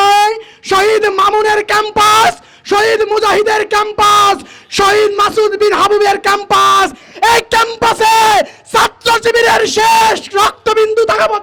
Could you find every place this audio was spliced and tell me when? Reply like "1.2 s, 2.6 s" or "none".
none